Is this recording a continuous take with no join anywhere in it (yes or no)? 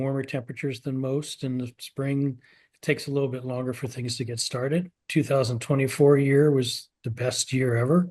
no